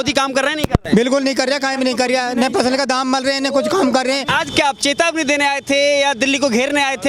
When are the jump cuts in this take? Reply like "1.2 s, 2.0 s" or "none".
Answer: 4.3 s